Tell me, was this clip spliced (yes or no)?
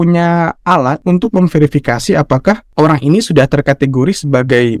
yes